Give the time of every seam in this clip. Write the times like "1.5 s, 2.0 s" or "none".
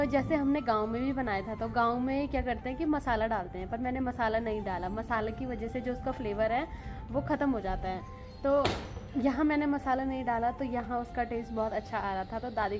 none

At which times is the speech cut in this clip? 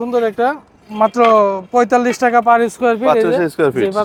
none

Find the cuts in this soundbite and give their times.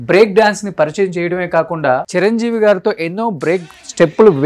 2.1 s

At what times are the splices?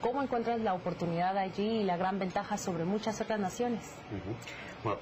3.0 s

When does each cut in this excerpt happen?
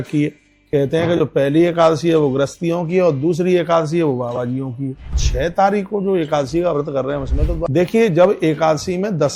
5.2 s, 7.6 s

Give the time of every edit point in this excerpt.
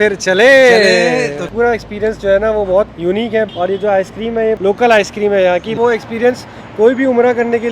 1.5 s, 3.3 s, 4.6 s, 5.8 s

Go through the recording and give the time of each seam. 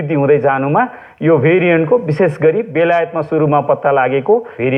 none

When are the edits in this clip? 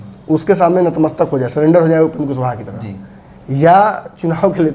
none

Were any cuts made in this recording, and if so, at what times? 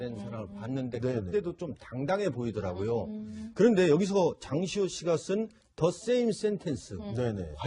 3.7 s

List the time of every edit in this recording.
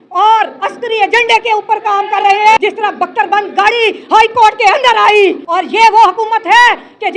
2.6 s, 5.4 s

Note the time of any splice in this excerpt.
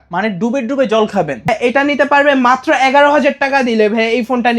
1.5 s

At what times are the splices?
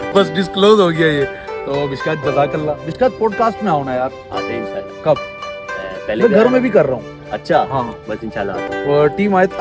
none

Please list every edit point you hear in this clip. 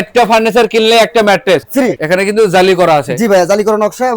1.7 s

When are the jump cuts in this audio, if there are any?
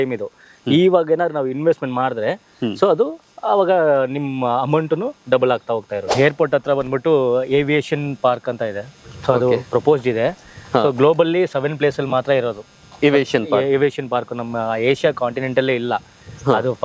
6.1 s

